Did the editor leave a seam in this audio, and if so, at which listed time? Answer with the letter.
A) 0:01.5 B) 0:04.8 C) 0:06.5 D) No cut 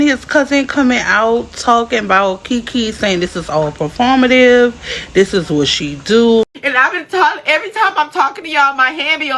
C